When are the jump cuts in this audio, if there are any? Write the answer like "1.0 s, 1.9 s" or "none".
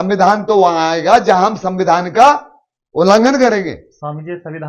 none